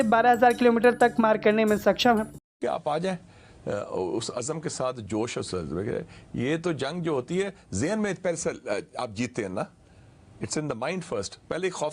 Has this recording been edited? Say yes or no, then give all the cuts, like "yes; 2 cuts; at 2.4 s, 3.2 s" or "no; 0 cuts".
yes; 1 cut; at 2.7 s